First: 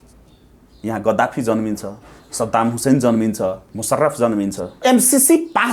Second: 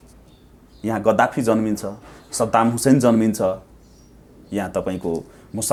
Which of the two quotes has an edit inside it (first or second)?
first